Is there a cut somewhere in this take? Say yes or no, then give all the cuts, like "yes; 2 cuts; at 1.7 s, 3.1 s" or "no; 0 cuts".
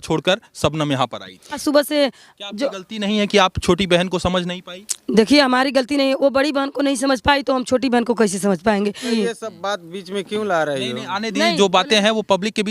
yes; 2 cuts; at 1.6 s, 9.1 s